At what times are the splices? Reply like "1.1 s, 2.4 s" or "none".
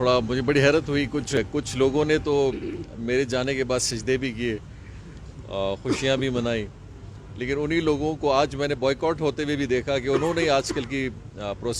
1.4 s